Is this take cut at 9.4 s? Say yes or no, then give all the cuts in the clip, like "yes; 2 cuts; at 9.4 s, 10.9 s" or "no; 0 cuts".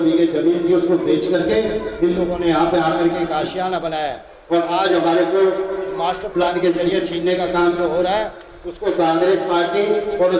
no; 0 cuts